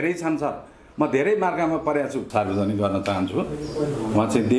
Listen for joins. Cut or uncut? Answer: cut